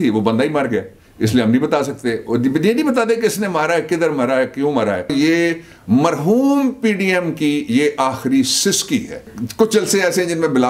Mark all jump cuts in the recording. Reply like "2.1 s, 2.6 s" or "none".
5.1 s, 9.4 s